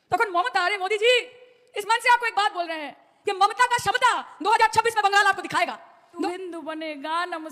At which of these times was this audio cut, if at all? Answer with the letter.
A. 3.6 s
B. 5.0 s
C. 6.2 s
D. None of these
C